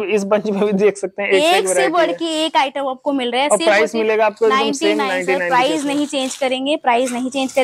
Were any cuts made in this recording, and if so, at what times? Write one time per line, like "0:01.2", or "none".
none